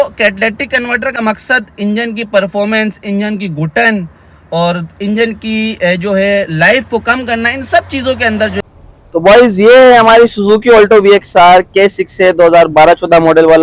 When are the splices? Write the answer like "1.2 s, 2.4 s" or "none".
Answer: 1.2 s, 8.6 s